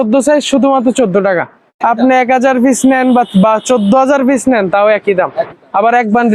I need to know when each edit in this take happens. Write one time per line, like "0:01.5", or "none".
0:01.8